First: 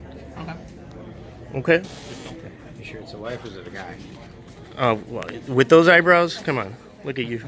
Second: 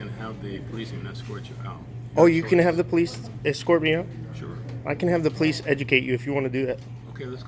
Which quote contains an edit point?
first; 1 cut; at 2.0 s

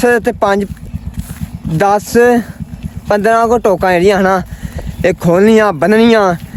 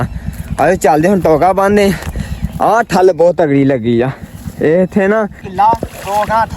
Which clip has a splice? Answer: second; 1 cut; at 5.4 s

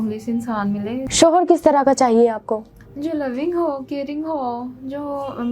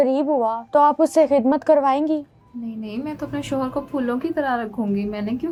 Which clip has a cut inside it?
first; 1 cut; at 1.1 s

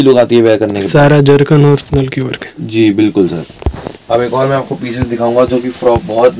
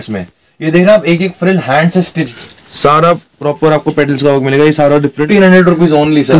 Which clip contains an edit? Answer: second; 2 cuts; at 2.3 s, 5.2 s

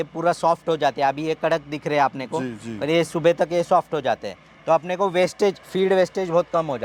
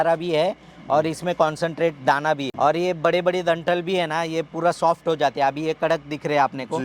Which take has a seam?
second; 1 cut; at 2.5 s

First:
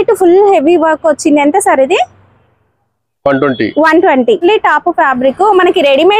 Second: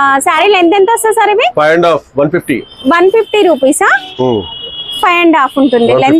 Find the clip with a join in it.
first; 1 cut; at 4.4 s

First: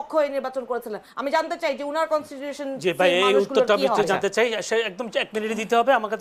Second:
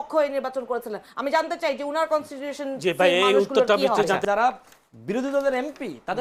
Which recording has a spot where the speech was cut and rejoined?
second; 1 cut; at 4.2 s

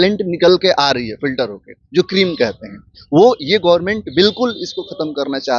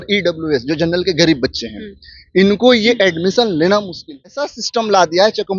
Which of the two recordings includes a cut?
second; 1 cut; at 4.6 s

